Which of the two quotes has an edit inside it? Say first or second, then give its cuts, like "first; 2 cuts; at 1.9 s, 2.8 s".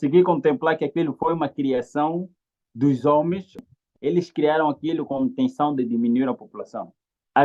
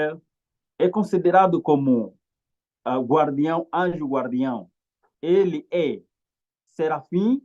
first; 1 cut; at 3.7 s